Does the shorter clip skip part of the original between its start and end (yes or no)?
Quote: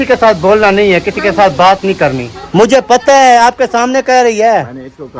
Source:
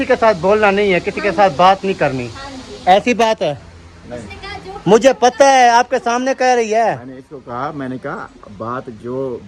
yes